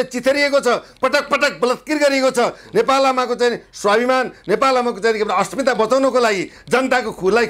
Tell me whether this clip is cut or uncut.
uncut